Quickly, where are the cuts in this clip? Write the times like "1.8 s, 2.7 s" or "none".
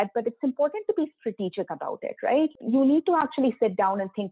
2.5 s